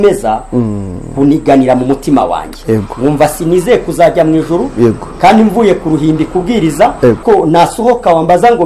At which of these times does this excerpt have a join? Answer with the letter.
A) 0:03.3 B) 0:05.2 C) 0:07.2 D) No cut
C